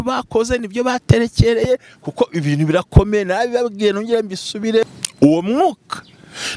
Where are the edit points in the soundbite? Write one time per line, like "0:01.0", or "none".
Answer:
0:04.8